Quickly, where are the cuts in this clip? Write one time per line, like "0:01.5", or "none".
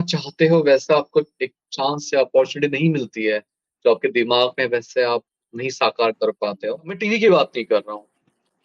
0:07.0

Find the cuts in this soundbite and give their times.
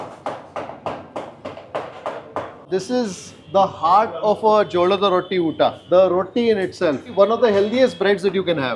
0:02.6
0:07.1

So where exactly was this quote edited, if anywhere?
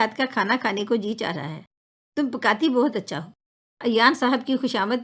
0:03.8

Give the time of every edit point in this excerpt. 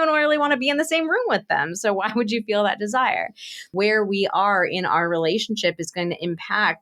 0:03.7

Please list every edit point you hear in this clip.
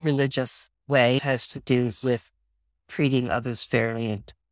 0:01.2

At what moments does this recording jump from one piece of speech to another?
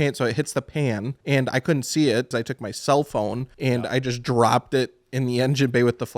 0:01.1
0:02.3
0:03.5

